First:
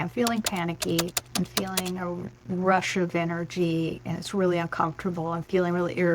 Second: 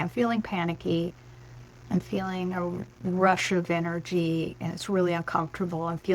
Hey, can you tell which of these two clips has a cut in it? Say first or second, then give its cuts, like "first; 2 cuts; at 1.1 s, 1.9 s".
first; 1 cut; at 1.2 s